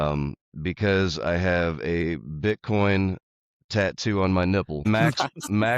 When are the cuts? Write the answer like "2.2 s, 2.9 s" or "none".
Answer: 4.9 s